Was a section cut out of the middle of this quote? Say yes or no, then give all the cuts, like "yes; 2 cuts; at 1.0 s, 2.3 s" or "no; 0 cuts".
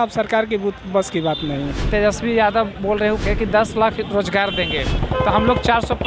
yes; 3 cuts; at 1.9 s, 3.2 s, 5.0 s